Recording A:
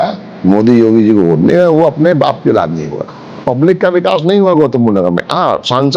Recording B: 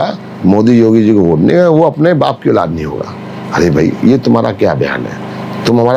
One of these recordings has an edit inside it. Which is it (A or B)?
A